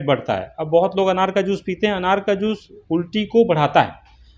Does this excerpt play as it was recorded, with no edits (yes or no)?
yes